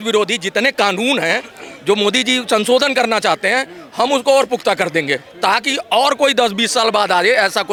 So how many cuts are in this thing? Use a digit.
0